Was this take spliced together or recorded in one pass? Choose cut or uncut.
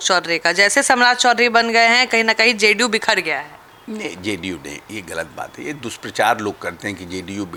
uncut